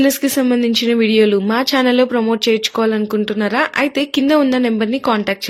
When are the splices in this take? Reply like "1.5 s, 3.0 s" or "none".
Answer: none